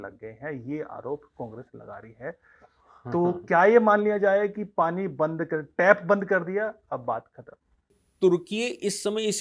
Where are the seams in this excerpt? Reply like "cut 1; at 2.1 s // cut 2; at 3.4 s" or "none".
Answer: cut 1; at 8.0 s